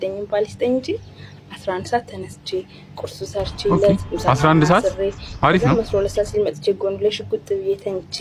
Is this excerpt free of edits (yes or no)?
yes